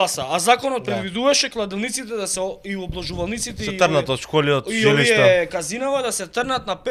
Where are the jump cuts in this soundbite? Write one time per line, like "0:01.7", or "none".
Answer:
none